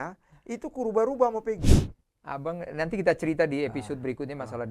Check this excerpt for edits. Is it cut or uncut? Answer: cut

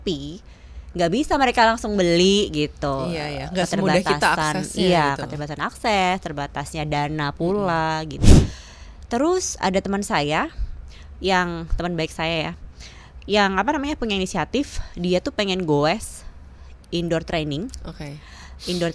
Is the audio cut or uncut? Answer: uncut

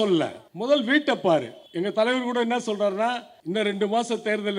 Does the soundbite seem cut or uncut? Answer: uncut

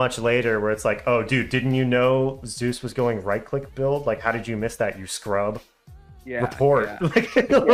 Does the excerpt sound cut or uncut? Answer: uncut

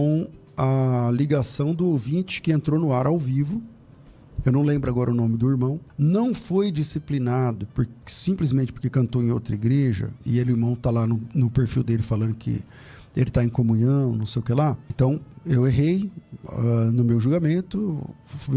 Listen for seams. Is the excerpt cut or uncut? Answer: cut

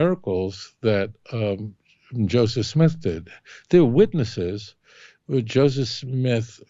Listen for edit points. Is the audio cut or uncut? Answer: uncut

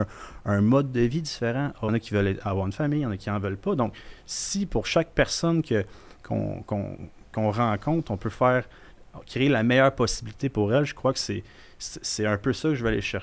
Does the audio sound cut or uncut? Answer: cut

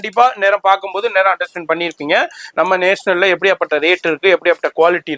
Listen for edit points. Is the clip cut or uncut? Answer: uncut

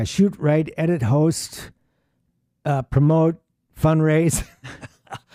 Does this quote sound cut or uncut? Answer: uncut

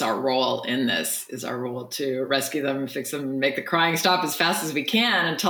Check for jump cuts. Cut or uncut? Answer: uncut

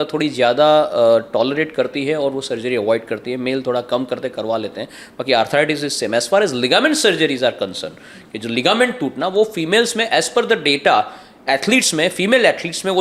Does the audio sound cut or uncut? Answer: uncut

